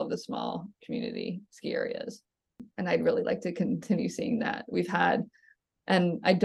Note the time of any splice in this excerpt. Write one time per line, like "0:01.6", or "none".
none